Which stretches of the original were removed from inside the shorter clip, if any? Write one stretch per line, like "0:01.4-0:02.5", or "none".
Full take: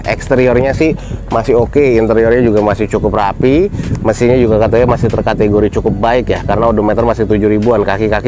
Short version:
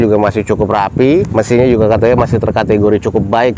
0:03.7-0:04.0